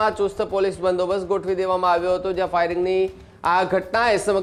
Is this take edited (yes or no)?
no